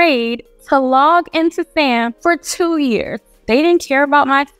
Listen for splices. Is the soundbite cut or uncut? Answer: cut